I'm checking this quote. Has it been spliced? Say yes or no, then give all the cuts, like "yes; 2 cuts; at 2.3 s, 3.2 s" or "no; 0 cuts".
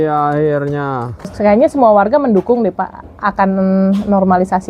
yes; 1 cut; at 1.3 s